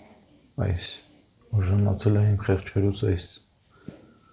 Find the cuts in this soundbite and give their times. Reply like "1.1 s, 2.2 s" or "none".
none